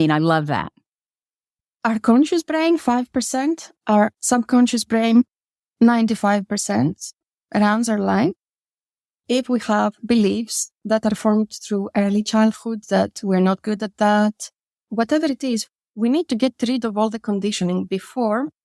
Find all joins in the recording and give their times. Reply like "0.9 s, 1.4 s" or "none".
14.7 s, 15.6 s